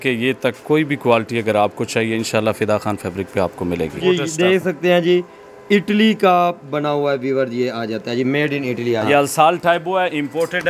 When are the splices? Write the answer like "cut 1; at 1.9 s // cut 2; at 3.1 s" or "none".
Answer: cut 1; at 4.0 s // cut 2; at 9.0 s